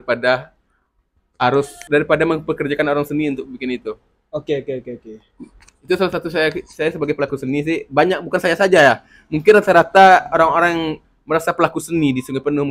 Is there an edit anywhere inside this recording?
yes; 1 cut; at 1.8 s

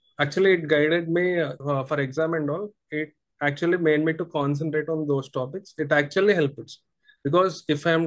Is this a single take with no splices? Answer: no; 1 cut; at 1.6 s

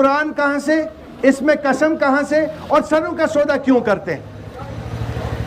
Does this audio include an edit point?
no; 0 cuts

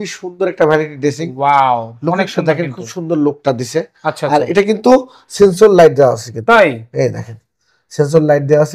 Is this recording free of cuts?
yes; 0 cuts

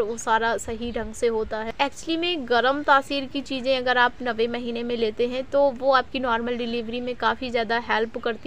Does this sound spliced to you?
yes; 1 cut; at 1.7 s

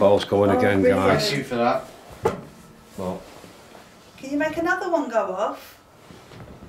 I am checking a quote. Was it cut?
no; 0 cuts

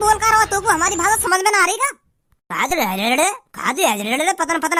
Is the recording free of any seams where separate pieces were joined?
yes; 0 cuts

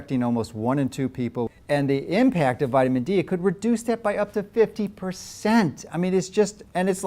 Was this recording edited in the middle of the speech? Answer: yes; 1 cut; at 1.6 s

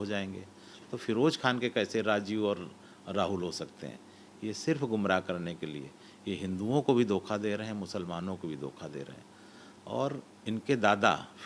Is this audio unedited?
yes; 0 cuts

